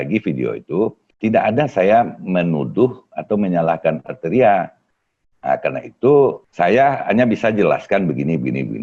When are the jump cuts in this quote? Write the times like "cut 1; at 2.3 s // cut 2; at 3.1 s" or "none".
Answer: cut 1; at 1.0 s // cut 2; at 6.4 s